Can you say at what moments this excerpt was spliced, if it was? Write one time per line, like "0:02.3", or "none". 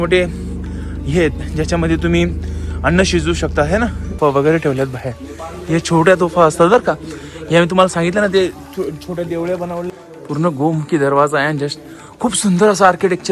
0:04.0
0:09.9